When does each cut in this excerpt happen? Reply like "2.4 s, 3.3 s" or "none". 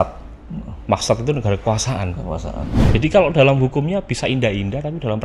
2.7 s